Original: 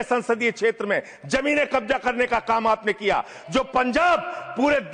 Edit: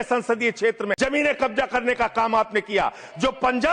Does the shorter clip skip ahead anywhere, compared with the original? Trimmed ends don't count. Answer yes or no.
yes